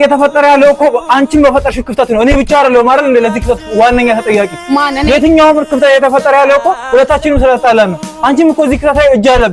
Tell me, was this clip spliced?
no; 0 cuts

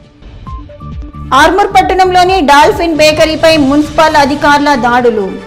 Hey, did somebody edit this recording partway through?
no; 0 cuts

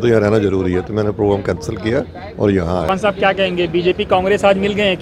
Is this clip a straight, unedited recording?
no; 1 cut; at 2.8 s

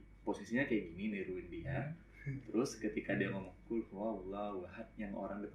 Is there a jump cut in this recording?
no; 0 cuts

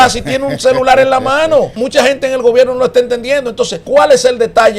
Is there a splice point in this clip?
yes; 2 cuts; at 1.8 s, 3.8 s

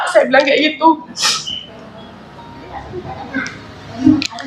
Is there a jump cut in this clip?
no; 0 cuts

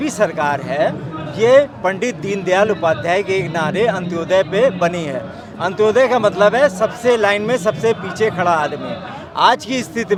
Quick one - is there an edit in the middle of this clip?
no; 0 cuts

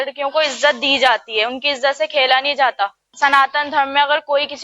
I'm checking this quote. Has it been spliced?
yes; 1 cut; at 3.1 s

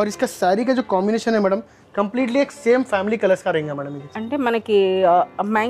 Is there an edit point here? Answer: no; 0 cuts

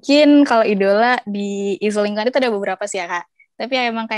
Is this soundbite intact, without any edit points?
yes; 0 cuts

